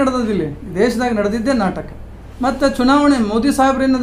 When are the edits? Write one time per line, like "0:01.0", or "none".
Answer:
none